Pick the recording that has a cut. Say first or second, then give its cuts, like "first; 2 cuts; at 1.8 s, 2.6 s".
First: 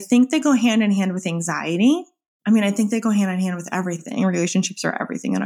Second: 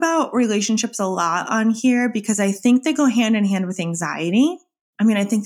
first; 1 cut; at 4.0 s